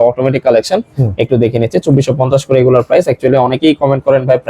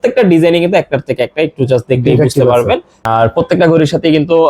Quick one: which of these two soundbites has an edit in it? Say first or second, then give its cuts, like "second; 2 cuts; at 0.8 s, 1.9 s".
second; 1 cut; at 2.9 s